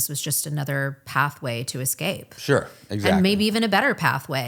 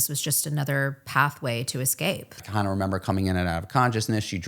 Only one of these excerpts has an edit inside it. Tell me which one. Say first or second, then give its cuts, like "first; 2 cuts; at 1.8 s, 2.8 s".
second; 1 cut; at 2.4 s